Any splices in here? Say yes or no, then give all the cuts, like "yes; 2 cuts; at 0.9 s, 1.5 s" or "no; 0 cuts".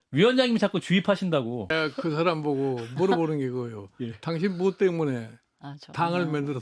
yes; 1 cut; at 1.8 s